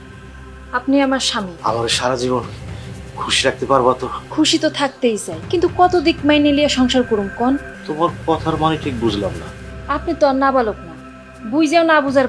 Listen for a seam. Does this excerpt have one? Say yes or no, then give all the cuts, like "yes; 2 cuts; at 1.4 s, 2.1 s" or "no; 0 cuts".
yes; 4 cuts; at 1.5 s, 4.2 s, 5.3 s, 7.8 s